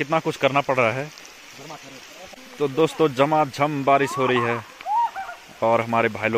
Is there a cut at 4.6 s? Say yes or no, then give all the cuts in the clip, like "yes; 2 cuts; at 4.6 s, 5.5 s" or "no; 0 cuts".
no; 1 cut; at 2.4 s